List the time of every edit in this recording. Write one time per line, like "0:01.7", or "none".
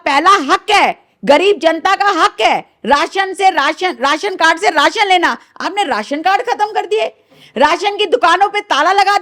none